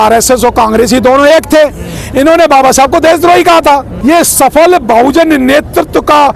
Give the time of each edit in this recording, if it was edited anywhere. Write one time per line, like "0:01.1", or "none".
0:03.9

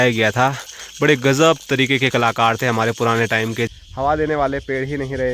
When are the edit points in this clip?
0:03.7

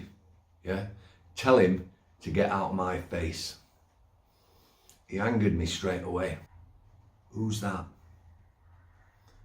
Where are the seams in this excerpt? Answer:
0:06.5

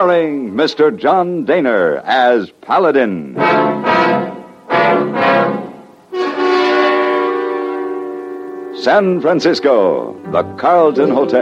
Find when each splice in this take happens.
0:10.2

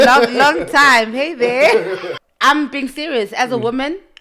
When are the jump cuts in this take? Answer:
0:02.1

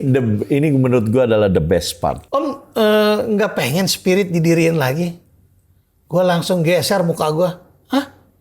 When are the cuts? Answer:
0:02.2

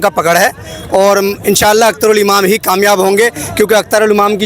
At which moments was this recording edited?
none

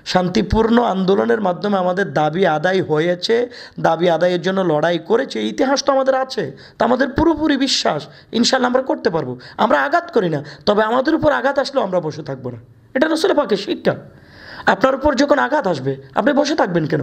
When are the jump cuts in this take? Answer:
none

